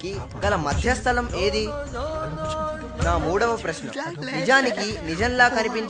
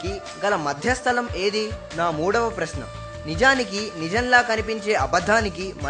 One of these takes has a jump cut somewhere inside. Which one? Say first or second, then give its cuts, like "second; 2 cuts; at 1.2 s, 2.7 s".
second; 1 cut; at 1.8 s